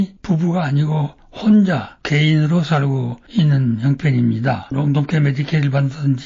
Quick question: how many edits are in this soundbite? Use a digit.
1